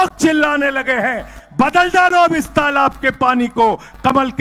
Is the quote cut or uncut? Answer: uncut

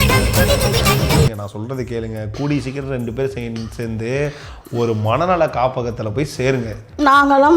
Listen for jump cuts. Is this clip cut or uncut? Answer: cut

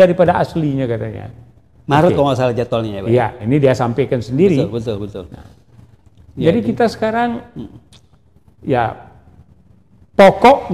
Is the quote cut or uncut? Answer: uncut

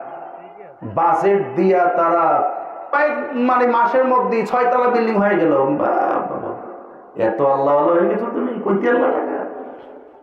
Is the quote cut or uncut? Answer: cut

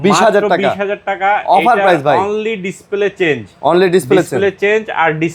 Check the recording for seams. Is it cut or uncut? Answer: uncut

